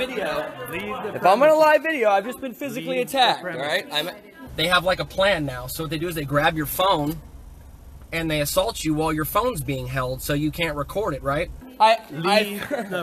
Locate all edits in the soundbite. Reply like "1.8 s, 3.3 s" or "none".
4.5 s, 11.6 s